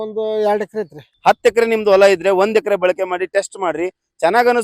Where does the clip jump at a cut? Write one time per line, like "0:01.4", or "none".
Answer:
0:01.1